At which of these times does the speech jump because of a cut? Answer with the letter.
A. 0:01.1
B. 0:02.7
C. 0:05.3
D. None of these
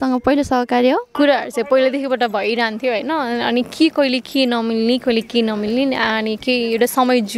A